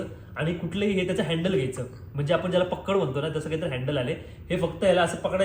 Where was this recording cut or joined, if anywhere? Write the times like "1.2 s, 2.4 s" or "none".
none